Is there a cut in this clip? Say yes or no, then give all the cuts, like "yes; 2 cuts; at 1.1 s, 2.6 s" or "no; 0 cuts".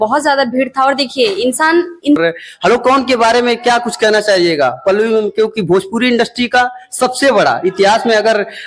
yes; 1 cut; at 2.2 s